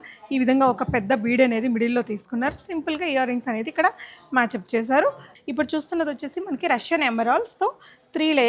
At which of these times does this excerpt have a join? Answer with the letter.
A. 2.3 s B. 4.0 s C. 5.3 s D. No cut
C